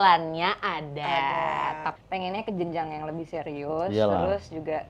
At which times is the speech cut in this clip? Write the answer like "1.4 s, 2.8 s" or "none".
1.9 s